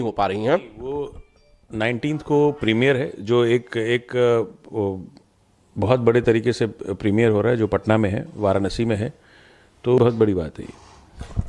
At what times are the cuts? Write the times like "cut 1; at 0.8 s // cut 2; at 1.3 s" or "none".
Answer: cut 1; at 10.0 s